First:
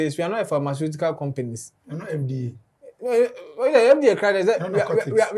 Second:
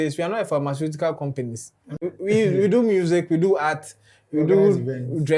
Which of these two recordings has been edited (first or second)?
second